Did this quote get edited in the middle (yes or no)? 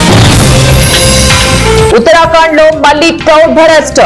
yes